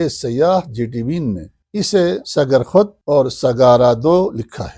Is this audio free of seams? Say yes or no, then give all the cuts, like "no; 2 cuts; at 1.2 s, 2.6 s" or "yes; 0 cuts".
no; 2 cuts; at 2.0 s, 3.0 s